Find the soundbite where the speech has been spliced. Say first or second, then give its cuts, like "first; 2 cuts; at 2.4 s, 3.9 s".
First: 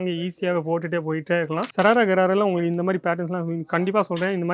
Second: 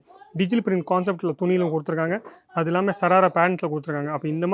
first; 1 cut; at 1.7 s